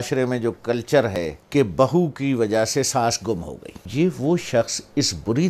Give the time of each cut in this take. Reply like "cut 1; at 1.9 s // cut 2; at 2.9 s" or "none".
cut 1; at 1.2 s // cut 2; at 3.8 s

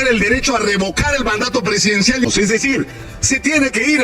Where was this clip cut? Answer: cut 1; at 2.2 s

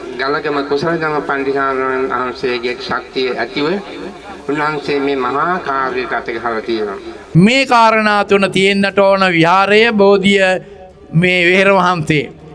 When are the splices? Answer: cut 1; at 7.1 s

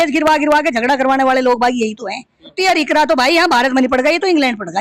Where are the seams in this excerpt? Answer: cut 1; at 2.5 s

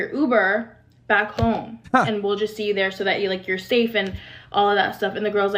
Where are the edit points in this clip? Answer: none

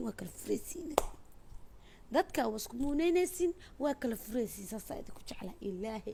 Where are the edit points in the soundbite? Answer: none

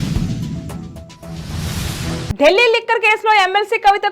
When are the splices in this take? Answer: cut 1; at 2.3 s

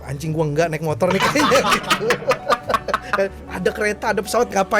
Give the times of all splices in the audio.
none

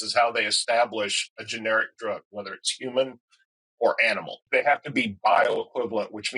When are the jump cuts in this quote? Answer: cut 1; at 4.4 s

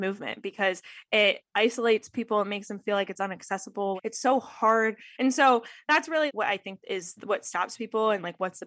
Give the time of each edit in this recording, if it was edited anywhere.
cut 1; at 5.0 s

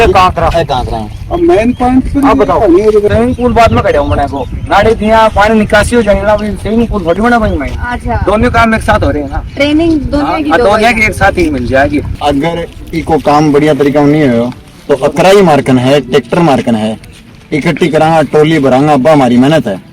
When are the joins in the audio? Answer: cut 1; at 3.1 s // cut 2; at 12.2 s

